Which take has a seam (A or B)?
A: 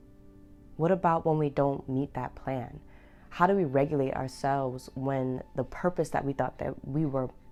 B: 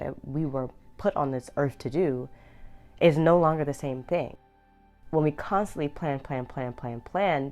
B